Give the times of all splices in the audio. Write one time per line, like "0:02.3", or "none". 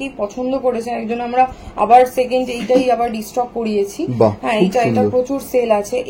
none